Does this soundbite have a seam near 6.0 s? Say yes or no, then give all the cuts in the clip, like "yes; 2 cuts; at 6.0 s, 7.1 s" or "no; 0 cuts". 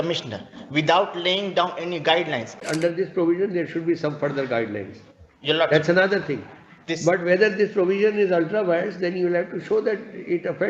no; 1 cut; at 2.6 s